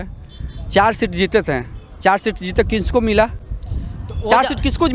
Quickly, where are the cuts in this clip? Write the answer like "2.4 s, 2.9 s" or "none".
none